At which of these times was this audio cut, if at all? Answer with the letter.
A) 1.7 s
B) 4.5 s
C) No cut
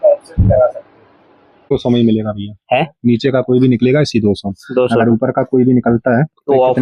A